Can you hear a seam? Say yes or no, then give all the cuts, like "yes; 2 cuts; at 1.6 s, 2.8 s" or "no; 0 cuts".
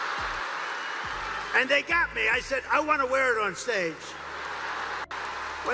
no; 0 cuts